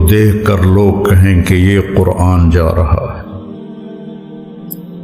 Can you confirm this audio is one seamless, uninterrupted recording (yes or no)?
yes